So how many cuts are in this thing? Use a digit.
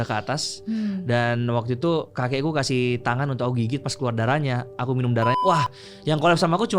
1